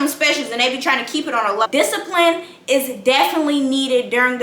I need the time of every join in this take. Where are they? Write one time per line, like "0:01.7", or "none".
0:01.7